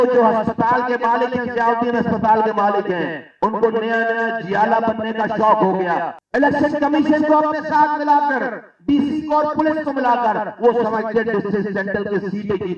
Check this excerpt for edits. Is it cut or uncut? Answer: cut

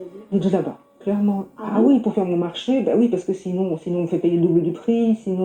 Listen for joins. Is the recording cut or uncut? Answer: uncut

